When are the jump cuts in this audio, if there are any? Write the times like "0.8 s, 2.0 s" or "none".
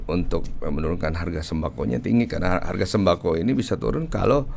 none